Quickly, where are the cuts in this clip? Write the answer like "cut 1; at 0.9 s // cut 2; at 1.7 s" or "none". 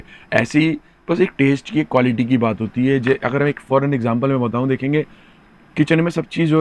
none